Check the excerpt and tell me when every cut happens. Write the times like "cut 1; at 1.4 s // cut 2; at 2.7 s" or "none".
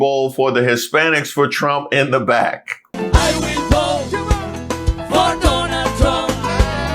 cut 1; at 2.9 s